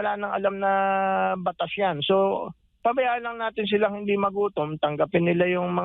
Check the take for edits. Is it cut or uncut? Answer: uncut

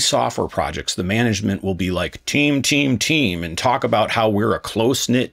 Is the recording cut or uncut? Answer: uncut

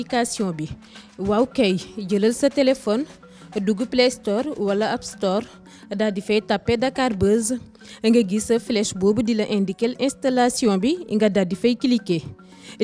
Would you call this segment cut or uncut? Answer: uncut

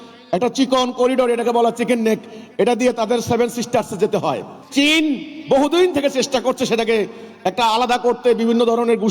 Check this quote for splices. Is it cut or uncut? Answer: cut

